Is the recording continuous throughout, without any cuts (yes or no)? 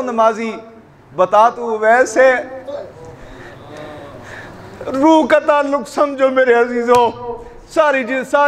yes